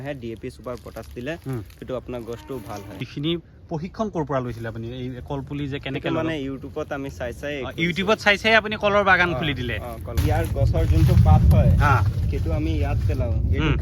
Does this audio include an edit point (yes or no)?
yes